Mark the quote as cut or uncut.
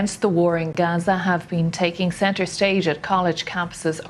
uncut